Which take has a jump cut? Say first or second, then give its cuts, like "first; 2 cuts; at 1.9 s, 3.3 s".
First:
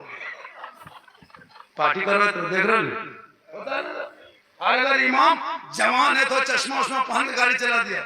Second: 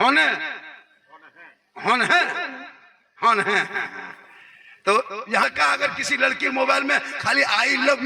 second; 1 cut; at 5.4 s